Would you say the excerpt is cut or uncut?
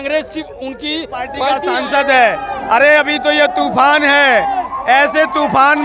cut